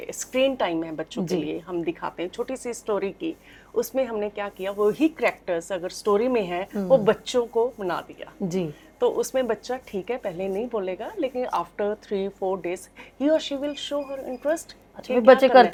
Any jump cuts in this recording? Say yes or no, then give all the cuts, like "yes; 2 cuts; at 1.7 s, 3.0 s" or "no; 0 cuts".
no; 0 cuts